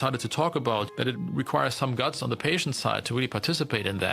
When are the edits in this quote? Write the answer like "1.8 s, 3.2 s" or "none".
1.2 s